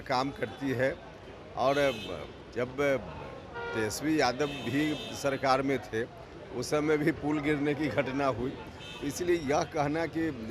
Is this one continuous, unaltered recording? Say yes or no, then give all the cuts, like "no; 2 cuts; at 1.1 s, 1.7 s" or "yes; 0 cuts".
yes; 0 cuts